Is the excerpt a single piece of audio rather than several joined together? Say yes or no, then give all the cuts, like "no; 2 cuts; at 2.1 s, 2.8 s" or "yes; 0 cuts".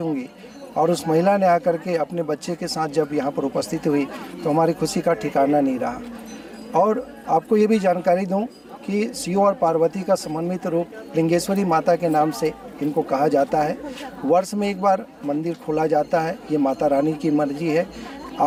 yes; 0 cuts